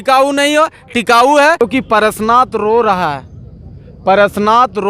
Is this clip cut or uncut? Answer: cut